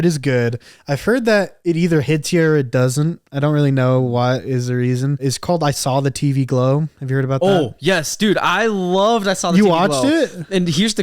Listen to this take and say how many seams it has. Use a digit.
1